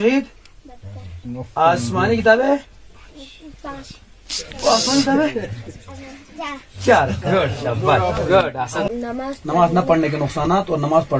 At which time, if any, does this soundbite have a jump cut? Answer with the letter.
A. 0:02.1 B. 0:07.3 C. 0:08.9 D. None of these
C